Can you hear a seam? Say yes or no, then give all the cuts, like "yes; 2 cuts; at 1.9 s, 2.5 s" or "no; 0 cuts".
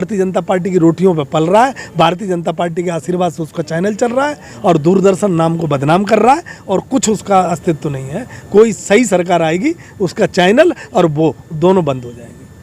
no; 0 cuts